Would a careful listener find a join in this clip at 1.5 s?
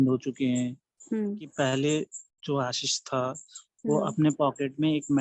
yes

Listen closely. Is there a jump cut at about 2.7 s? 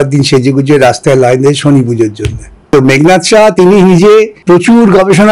yes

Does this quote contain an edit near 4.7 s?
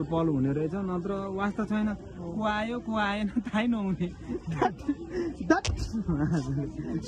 no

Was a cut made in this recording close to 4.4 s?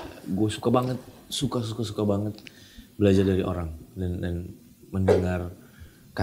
no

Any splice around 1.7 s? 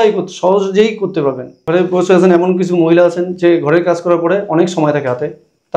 yes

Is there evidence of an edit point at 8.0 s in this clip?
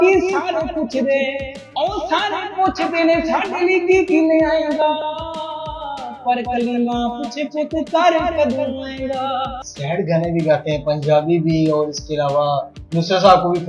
no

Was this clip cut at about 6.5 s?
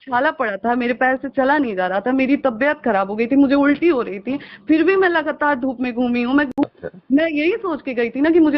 yes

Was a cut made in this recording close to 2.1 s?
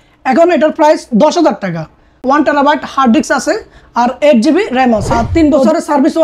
yes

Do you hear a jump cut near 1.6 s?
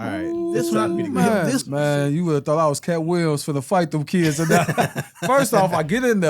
yes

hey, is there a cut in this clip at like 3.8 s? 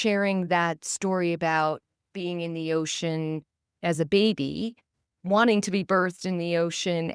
yes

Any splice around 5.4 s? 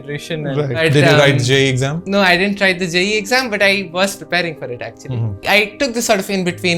yes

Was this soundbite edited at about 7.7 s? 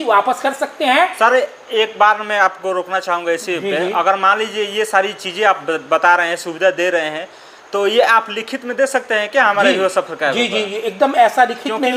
no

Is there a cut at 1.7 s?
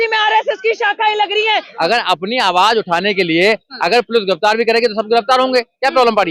yes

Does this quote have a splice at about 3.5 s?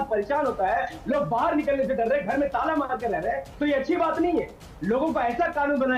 no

